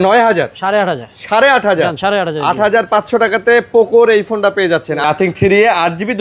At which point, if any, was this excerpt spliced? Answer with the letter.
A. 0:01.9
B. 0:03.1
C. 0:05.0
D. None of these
C